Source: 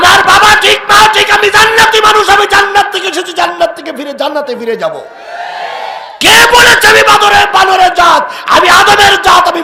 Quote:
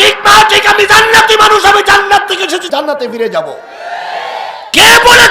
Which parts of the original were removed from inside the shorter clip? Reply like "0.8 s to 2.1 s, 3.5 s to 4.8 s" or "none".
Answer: 3.3 s to 4.1 s